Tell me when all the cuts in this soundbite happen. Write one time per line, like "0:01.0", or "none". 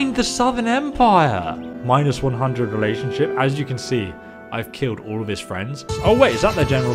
0:05.9